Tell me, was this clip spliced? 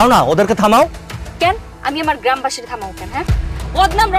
no; 0 cuts

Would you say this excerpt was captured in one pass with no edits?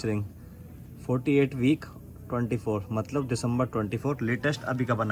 yes; 0 cuts

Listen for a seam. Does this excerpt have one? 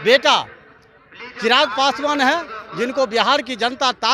no; 0 cuts

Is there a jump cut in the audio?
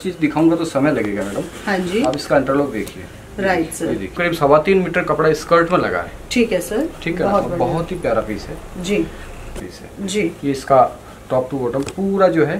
yes; 2 cuts; at 4.2 s, 9.7 s

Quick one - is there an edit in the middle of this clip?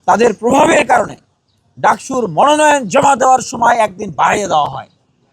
no; 0 cuts

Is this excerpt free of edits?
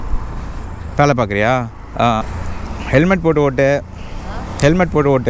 no; 1 cut; at 2.2 s

